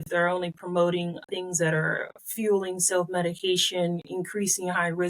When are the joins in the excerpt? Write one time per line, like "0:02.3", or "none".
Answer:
0:01.2